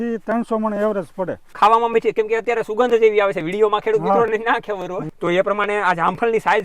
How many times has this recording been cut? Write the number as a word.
two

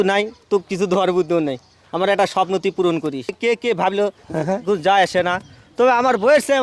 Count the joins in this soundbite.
one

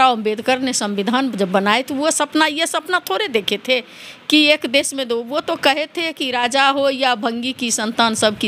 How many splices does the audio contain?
zero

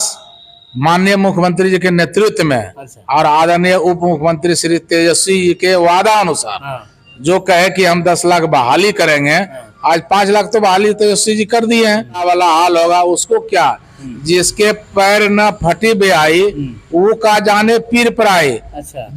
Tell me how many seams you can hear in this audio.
one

